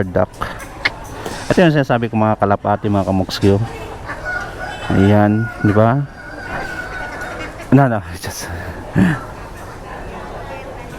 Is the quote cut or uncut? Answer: uncut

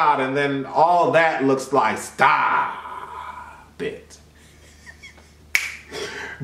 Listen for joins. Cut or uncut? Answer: cut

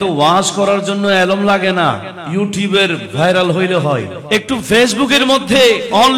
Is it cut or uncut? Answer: cut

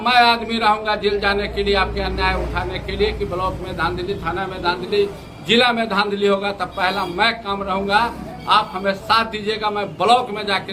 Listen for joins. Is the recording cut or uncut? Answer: uncut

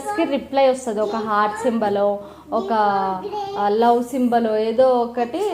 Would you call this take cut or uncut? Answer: uncut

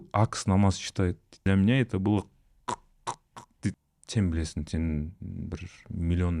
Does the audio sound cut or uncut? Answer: cut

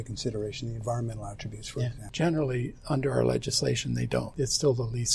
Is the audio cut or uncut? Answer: cut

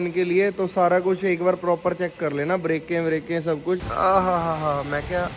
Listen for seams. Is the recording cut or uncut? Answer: cut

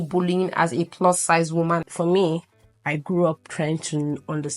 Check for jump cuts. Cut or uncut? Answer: cut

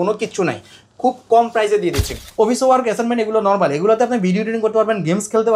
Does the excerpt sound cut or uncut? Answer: cut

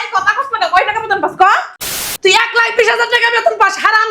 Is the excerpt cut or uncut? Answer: cut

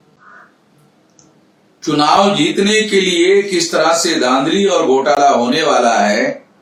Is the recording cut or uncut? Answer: uncut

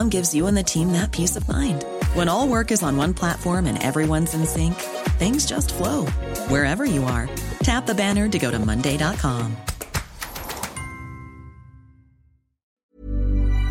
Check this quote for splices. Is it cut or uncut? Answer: cut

